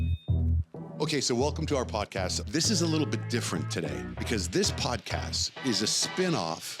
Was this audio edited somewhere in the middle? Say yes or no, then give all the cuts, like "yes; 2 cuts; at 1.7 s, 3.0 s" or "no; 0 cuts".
yes; 1 cut; at 0.9 s